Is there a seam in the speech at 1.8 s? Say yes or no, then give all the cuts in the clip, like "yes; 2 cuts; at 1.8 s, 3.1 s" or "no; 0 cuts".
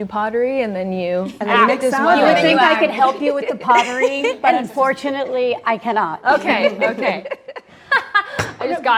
no; 0 cuts